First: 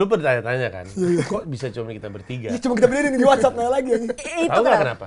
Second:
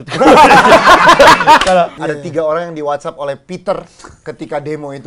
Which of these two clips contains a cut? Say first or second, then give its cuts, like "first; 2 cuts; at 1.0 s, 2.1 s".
second; 1 cut; at 2.0 s